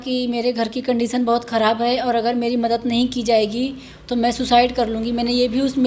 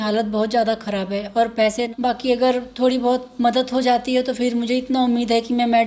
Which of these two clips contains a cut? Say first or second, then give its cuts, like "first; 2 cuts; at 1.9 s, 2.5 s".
second; 1 cut; at 1.9 s